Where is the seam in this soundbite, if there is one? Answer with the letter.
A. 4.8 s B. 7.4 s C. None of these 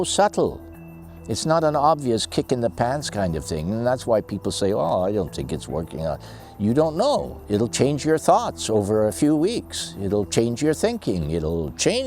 B